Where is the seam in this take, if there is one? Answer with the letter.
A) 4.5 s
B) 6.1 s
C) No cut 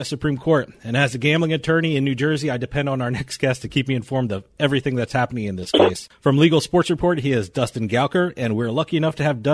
B